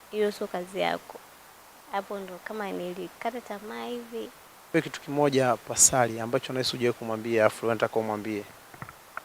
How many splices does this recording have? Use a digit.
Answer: 1